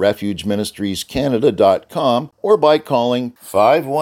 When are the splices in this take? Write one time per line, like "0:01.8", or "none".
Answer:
0:02.3